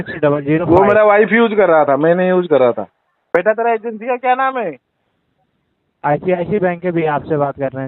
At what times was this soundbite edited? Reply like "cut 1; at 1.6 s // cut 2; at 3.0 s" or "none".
cut 1; at 3.1 s